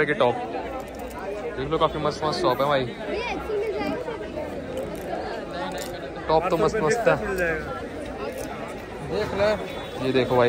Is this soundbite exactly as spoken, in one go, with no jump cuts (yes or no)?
yes